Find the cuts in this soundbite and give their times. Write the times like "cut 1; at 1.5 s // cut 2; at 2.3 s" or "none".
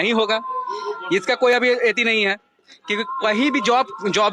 none